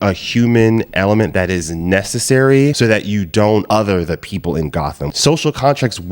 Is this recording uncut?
no; 2 cuts; at 3.7 s, 5.1 s

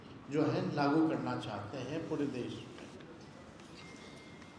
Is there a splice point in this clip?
no; 0 cuts

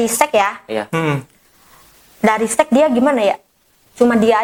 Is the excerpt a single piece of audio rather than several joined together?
yes; 0 cuts

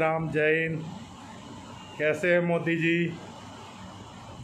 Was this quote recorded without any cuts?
yes; 0 cuts

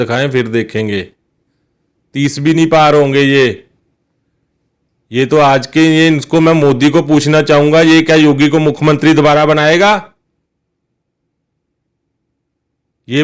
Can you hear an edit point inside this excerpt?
no; 0 cuts

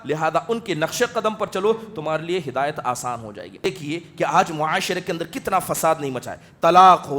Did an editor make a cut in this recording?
yes; 1 cut; at 3.6 s

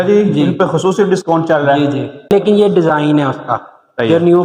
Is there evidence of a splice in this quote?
yes; 1 cut; at 2.3 s

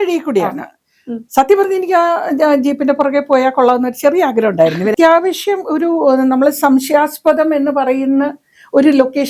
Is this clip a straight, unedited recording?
no; 1 cut; at 4.9 s

